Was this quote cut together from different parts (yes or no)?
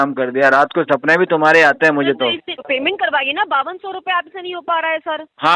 yes